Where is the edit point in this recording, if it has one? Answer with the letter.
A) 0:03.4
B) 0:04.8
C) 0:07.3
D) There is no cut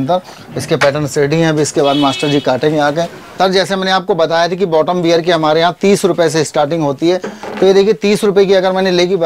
A